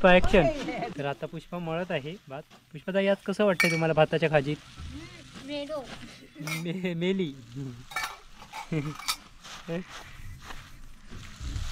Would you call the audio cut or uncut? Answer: cut